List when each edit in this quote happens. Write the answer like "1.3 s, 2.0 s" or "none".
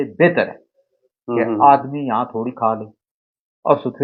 none